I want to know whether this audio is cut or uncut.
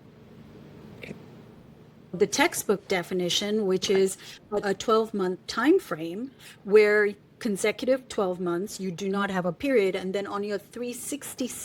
cut